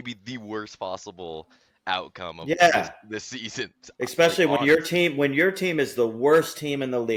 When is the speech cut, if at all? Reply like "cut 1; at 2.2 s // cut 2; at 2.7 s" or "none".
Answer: none